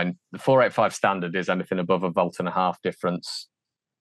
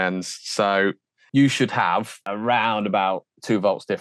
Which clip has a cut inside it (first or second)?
second